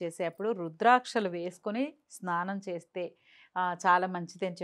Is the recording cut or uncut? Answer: uncut